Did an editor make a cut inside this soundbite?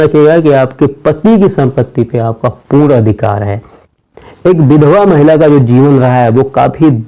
yes; 1 cut; at 4.0 s

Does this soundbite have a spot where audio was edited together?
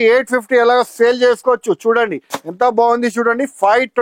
no; 0 cuts

